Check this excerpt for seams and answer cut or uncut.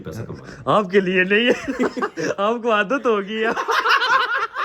uncut